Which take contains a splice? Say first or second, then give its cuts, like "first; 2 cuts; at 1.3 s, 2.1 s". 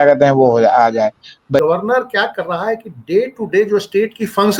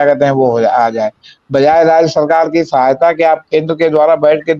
first; 1 cut; at 1.6 s